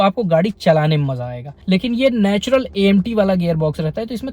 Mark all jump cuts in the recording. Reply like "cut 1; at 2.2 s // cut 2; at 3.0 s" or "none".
cut 1; at 1.5 s